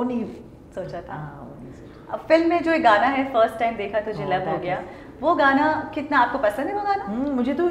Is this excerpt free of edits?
yes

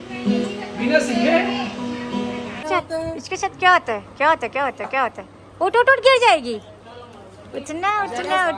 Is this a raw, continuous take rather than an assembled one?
no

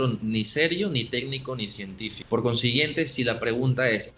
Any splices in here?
yes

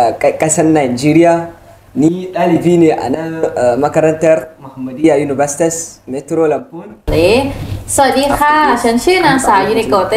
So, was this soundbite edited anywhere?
yes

